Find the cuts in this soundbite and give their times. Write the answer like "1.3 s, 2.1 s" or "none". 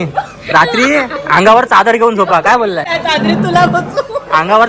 2.9 s